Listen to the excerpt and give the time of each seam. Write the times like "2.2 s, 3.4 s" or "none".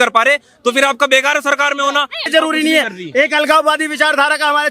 2.3 s